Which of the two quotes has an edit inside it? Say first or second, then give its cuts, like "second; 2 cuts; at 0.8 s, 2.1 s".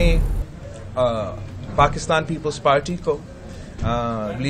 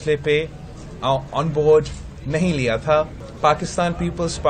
second; 1 cut; at 3.2 s